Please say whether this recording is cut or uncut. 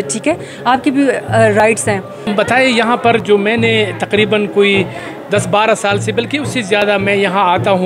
cut